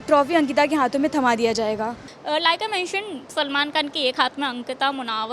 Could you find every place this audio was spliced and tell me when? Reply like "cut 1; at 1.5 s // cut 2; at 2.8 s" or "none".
none